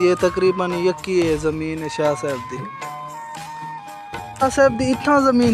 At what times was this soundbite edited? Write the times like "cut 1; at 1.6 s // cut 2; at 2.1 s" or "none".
none